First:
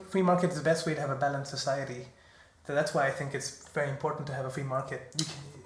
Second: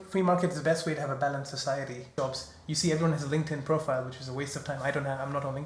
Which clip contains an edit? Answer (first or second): second